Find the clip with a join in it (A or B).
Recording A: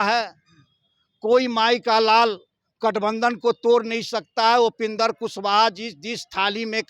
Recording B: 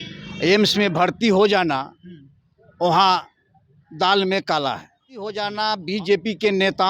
B